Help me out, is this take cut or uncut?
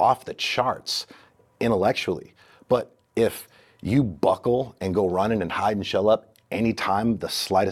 uncut